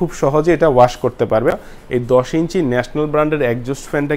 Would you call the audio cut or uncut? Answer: cut